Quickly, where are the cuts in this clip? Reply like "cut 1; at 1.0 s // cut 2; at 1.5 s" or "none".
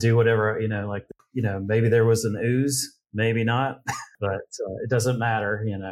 cut 1; at 1.0 s // cut 2; at 4.1 s